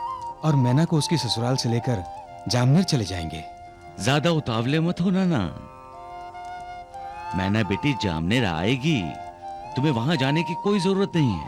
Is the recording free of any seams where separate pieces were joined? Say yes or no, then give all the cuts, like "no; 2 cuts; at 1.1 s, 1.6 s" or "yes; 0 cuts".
yes; 0 cuts